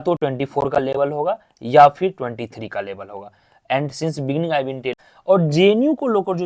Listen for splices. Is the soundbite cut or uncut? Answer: cut